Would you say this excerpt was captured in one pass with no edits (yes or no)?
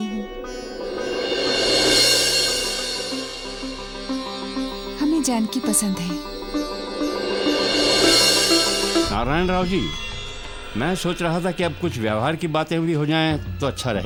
yes